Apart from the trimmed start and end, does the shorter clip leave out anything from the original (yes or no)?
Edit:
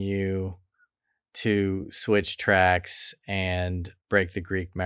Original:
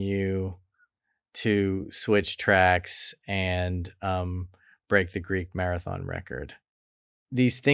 yes